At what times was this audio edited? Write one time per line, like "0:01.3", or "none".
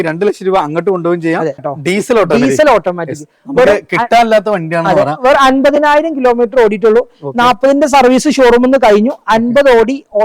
0:01.7

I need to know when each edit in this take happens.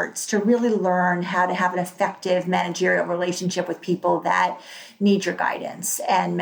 none

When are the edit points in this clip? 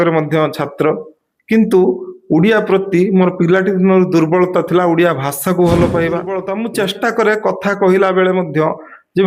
0:06.4

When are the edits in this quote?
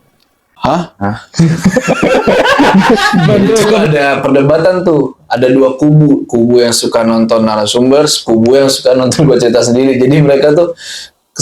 0:03.8

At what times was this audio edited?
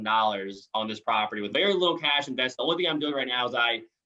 0:01.4

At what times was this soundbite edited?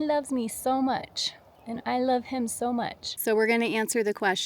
0:03.1

